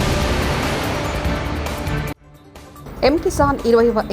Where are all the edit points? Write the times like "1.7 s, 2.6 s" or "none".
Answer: 2.2 s